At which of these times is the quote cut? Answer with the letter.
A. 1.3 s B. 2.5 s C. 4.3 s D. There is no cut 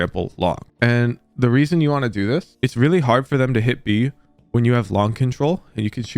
B